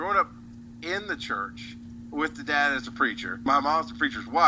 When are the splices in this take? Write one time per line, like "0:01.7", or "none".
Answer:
0:03.5

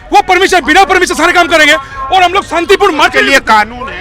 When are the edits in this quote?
none

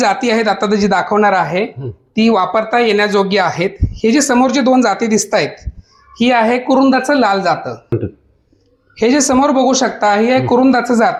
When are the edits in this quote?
none

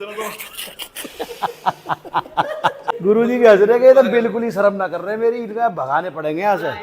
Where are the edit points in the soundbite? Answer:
0:02.9

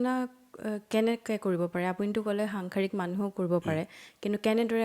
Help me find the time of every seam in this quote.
none

